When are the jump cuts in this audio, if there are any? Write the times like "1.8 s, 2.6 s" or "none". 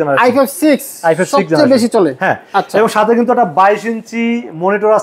none

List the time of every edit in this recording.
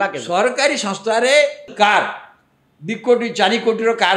1.7 s

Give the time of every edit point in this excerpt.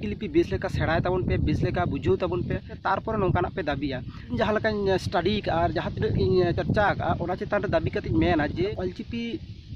2.7 s, 4.4 s, 8.7 s

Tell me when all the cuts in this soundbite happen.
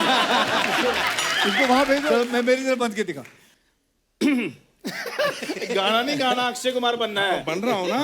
2.1 s

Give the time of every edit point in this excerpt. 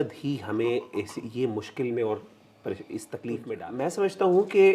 3.5 s

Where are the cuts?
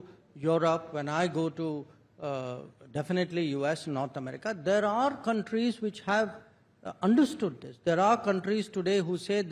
none

